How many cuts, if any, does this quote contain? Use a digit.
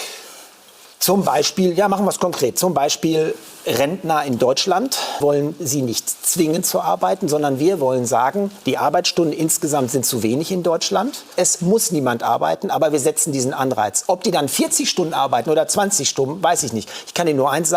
2